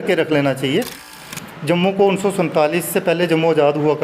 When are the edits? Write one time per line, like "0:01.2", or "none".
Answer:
0:01.0